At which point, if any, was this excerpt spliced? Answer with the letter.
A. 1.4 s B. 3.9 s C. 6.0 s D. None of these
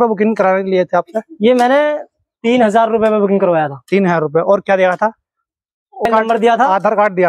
C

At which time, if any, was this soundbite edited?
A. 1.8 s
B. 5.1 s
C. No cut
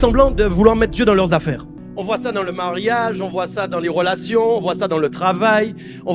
A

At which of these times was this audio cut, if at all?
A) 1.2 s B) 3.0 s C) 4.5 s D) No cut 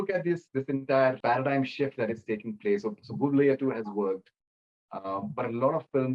A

